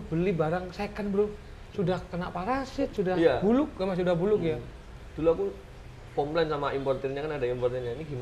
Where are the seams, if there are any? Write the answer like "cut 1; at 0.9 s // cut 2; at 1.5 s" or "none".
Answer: none